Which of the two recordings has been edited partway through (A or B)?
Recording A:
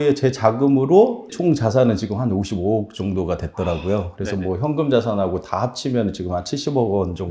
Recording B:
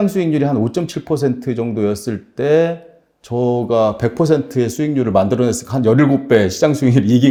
A